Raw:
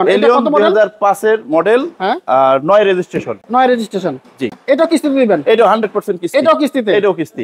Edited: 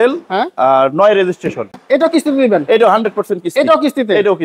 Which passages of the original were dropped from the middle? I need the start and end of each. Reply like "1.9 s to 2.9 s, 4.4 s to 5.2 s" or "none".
3.4 s to 4.5 s